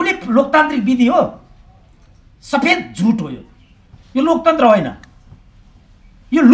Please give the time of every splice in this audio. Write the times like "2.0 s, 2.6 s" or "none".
none